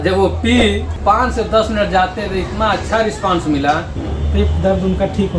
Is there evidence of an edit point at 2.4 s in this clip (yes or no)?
no